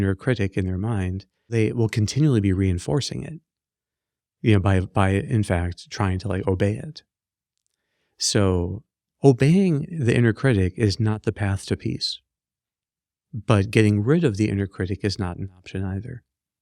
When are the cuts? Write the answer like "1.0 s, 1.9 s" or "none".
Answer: 1.5 s